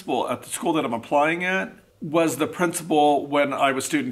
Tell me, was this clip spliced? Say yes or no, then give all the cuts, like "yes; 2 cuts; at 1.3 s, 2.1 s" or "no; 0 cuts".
no; 0 cuts